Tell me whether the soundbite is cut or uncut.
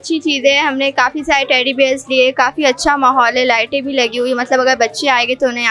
uncut